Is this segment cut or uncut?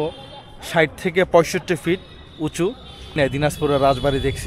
cut